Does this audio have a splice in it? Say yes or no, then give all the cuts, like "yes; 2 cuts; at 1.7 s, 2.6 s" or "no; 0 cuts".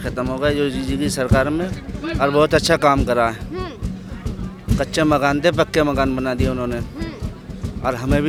no; 0 cuts